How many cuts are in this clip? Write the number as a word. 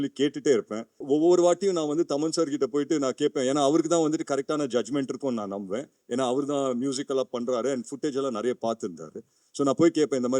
one